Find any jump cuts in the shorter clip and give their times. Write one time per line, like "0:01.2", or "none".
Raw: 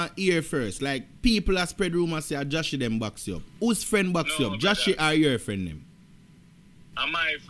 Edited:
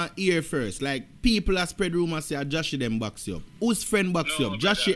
none